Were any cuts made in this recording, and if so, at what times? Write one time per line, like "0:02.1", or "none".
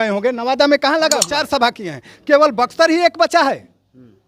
0:01.4